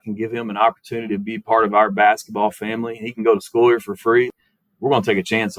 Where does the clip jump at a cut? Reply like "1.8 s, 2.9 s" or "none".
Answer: 4.3 s